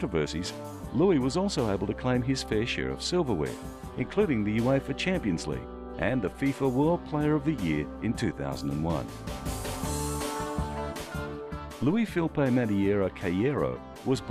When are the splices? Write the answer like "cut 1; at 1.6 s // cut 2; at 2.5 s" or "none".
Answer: cut 1; at 5.8 s